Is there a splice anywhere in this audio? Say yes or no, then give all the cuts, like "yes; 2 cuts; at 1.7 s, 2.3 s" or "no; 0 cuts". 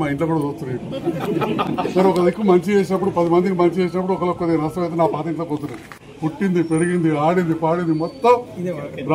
no; 0 cuts